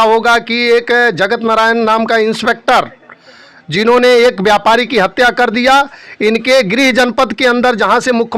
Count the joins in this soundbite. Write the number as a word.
zero